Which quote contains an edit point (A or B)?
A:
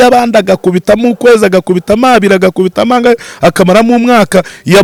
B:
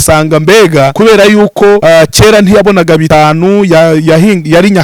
B